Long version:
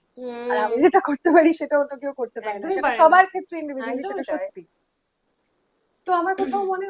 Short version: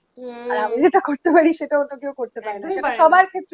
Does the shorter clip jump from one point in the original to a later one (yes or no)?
no